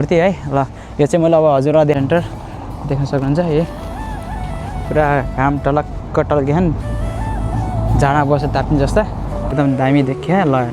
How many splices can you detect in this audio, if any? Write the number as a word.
two